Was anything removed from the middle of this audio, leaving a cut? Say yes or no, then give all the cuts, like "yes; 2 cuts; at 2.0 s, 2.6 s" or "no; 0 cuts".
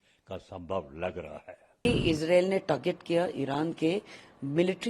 yes; 1 cut; at 1.7 s